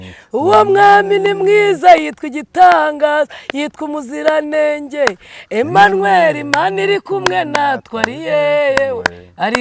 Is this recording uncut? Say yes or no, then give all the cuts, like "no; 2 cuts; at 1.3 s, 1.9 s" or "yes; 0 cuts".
yes; 0 cuts